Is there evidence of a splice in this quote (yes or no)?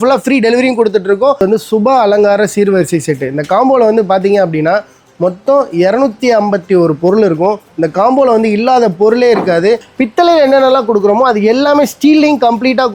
yes